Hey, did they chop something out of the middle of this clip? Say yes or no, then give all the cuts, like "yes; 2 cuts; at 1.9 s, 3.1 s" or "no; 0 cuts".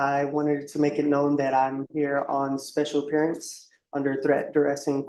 no; 0 cuts